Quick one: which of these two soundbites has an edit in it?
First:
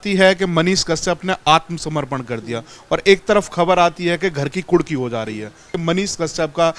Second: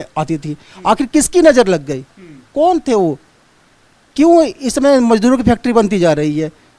first; 1 cut; at 5.8 s

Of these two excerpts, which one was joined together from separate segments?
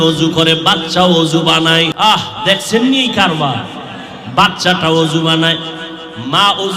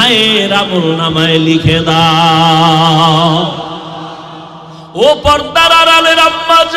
first; 1 cut; at 1.9 s

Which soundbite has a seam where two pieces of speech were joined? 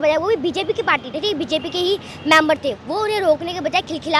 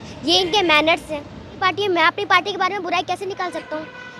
second; 1 cut; at 1.6 s

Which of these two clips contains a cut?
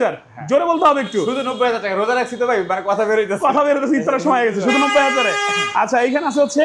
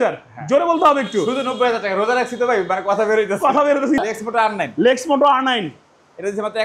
second; 1 cut; at 4.0 s

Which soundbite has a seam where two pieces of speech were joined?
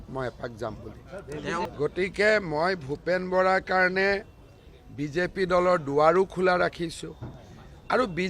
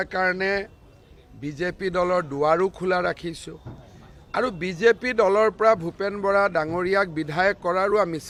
first; 1 cut; at 1.7 s

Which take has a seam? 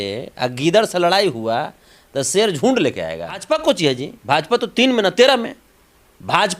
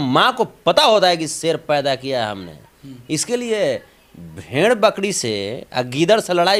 first; 1 cut; at 3.4 s

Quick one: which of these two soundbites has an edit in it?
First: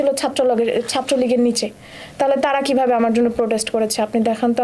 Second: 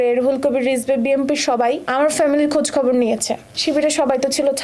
second; 2 cuts; at 1.9 s, 3.5 s

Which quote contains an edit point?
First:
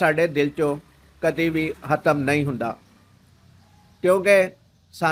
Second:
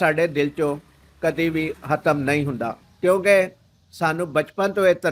second; 1 cut; at 2.8 s

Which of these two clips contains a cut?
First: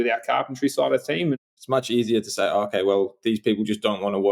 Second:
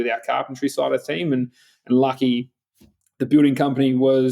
first; 1 cut; at 1.4 s

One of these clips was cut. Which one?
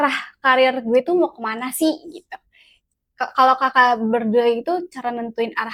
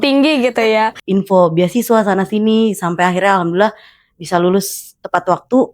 second; 1 cut; at 1.0 s

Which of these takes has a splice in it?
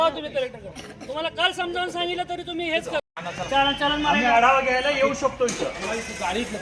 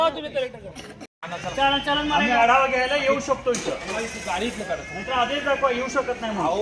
second; 1 cut; at 1.1 s

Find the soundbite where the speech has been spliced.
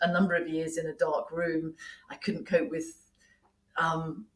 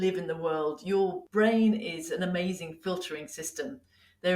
second; 1 cut; at 1.2 s

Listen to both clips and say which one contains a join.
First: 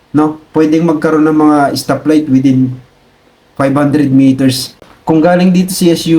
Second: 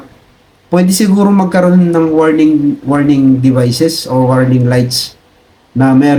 first; 1 cut; at 4.9 s

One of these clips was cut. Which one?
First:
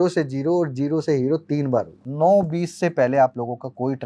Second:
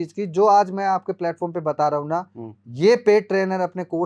first; 1 cut; at 2.0 s

